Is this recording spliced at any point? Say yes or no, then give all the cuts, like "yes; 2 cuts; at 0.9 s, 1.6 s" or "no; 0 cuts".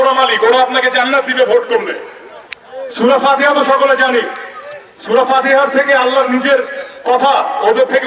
no; 0 cuts